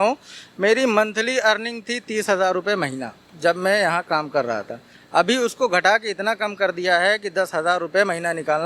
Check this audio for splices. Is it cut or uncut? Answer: uncut